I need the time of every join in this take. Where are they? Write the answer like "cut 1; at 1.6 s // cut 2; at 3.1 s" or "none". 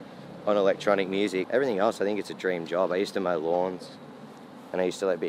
cut 1; at 1.5 s

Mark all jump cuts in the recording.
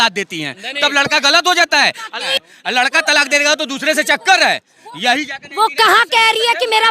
cut 1; at 2.3 s

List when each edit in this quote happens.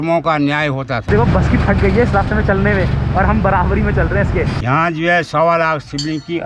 cut 1; at 1.0 s // cut 2; at 4.6 s

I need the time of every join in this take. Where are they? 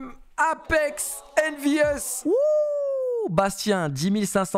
cut 1; at 2.1 s

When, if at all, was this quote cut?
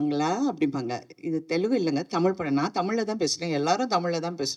none

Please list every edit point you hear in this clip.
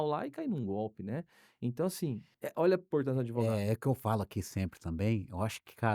cut 1; at 2.3 s

